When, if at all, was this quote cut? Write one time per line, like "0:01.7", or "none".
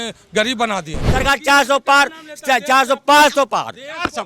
0:01.0